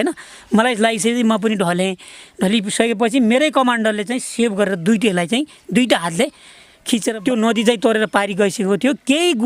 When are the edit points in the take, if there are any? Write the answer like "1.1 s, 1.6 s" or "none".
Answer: 7.1 s